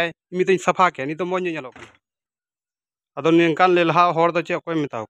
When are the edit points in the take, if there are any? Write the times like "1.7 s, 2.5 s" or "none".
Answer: 1.8 s